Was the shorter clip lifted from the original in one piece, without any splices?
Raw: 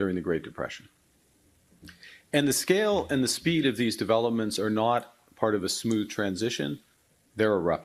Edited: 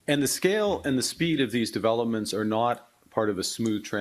yes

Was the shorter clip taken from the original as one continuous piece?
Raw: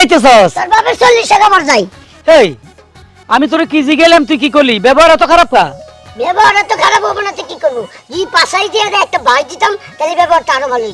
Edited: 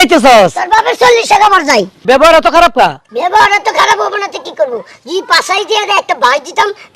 no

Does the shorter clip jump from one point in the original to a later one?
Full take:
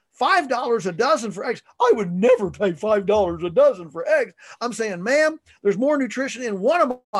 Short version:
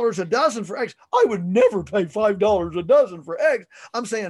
no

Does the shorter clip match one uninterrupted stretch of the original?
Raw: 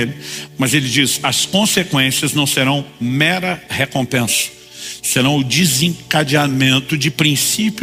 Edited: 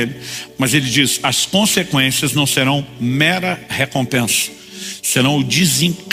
yes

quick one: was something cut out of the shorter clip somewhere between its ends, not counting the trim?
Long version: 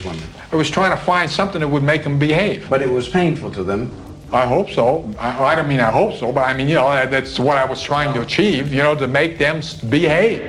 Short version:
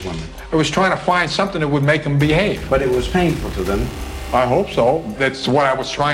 yes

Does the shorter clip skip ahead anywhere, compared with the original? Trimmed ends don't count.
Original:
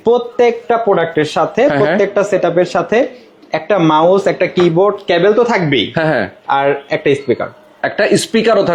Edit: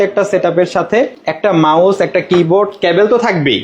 yes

